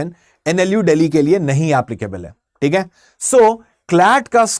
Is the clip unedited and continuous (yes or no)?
yes